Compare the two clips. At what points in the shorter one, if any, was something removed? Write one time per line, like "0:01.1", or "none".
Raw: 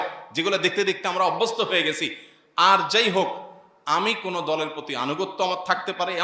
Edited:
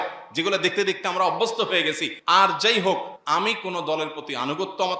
0:02.1
0:03.1